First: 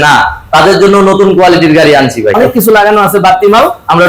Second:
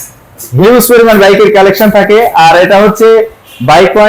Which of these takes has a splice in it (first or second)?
first